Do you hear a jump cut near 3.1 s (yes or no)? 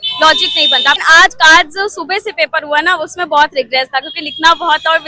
no